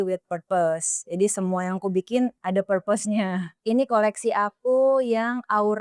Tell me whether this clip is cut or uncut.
cut